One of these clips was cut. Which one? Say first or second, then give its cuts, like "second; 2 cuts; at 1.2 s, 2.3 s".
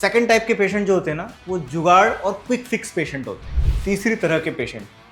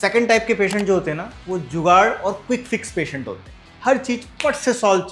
first; 1 cut; at 3.8 s